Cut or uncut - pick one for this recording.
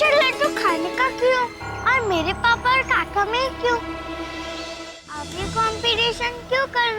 cut